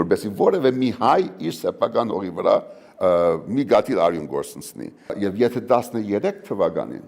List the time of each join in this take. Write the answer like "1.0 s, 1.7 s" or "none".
5.1 s